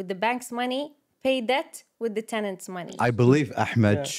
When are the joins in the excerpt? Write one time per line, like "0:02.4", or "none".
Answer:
0:03.0